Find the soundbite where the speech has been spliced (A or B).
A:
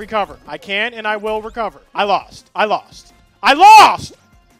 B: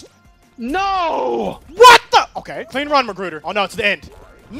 B